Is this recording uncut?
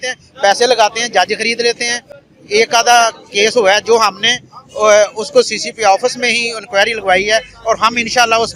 yes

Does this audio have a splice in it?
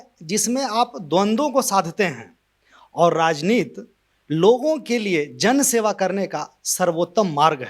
no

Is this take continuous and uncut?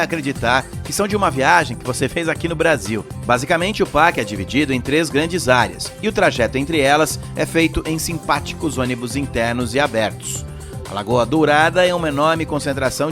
no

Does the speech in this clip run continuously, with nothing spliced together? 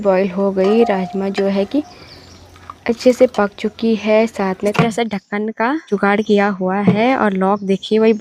no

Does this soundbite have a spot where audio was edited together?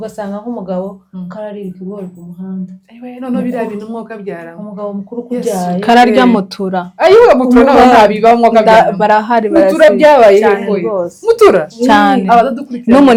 no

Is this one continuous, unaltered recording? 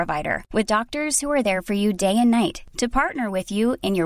yes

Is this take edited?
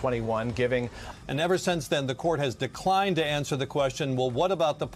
yes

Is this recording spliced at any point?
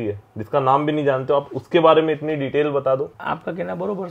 yes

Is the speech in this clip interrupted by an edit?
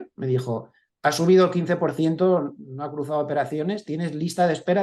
no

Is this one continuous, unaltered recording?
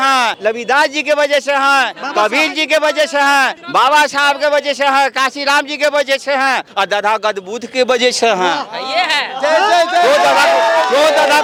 yes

